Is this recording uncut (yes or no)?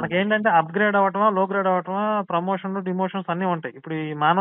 yes